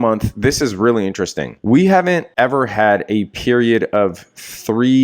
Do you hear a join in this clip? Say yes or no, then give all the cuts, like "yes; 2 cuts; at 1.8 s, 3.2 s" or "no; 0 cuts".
yes; 2 cuts; at 1.5 s, 2.3 s